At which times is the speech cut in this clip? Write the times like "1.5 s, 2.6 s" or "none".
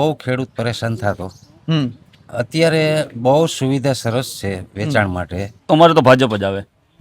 5.5 s